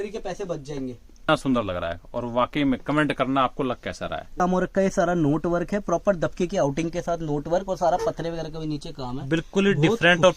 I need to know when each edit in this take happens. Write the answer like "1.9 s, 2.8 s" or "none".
1.3 s, 4.3 s

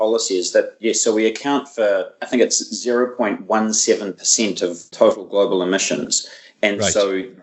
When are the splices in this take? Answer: 4.8 s

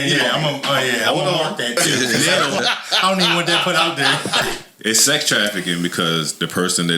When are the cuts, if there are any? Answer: 4.5 s

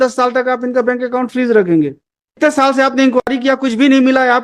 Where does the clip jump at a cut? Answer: 2.4 s

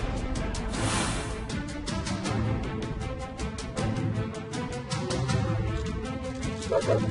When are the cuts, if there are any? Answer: none

